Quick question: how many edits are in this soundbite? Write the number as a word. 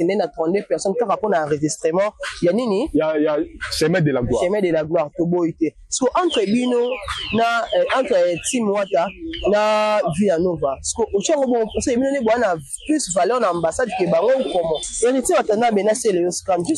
one